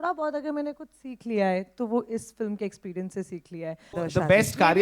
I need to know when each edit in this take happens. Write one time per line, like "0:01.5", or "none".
0:03.8